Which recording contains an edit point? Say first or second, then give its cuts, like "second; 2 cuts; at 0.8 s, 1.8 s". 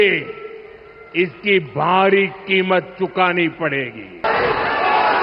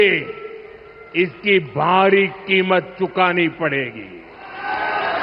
first; 1 cut; at 4.2 s